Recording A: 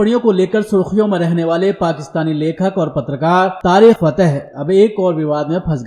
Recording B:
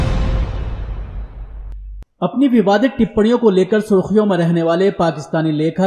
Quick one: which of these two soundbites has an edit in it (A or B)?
A